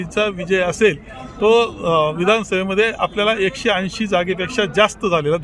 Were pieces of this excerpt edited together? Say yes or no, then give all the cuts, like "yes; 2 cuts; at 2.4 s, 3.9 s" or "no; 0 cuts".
no; 0 cuts